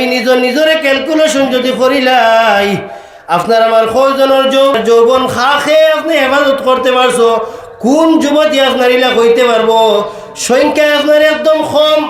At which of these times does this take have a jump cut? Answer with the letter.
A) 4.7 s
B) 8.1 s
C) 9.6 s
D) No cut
A